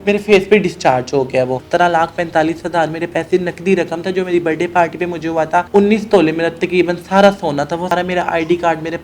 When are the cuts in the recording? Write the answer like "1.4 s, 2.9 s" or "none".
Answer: 1.6 s, 5.7 s, 7.9 s